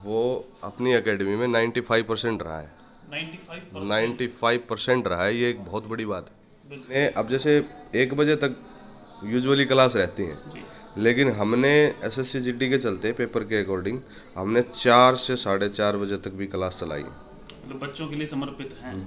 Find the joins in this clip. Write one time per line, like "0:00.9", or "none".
0:06.9